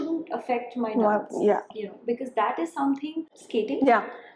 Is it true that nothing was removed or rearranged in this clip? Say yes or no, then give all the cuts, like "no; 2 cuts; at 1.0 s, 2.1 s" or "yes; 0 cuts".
no; 1 cut; at 3.4 s